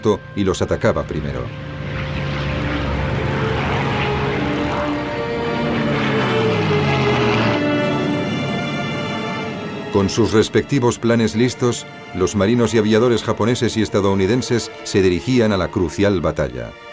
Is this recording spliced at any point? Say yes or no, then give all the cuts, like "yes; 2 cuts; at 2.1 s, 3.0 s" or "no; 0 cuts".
yes; 1 cut; at 9.6 s